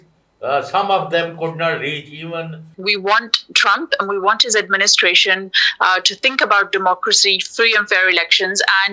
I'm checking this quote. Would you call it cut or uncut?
cut